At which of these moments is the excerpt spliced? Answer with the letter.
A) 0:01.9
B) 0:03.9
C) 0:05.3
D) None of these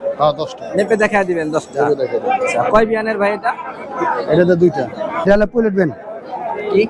C